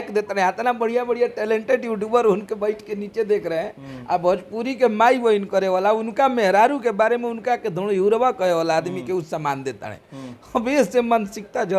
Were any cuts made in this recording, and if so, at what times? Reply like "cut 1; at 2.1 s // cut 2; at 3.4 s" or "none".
none

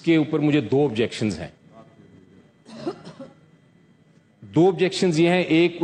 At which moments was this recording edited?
none

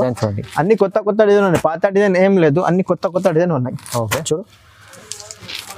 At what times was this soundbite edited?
none

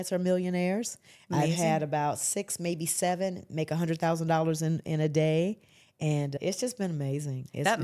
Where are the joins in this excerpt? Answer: cut 1; at 6.3 s

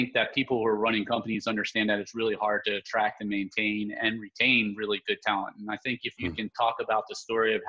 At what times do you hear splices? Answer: none

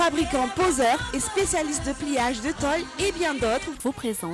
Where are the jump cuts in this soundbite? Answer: none

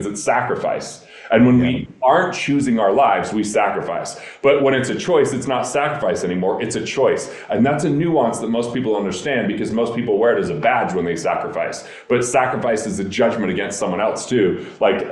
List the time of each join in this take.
none

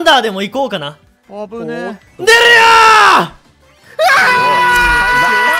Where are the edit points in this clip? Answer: none

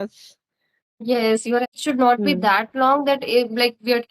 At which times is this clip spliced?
cut 1; at 1.7 s

